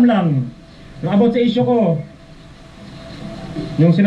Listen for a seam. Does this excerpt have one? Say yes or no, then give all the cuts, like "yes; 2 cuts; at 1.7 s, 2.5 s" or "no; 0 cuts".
no; 0 cuts